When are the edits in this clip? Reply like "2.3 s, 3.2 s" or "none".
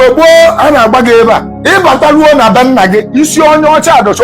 1.5 s